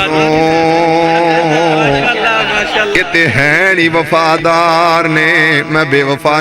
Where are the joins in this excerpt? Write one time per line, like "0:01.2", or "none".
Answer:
none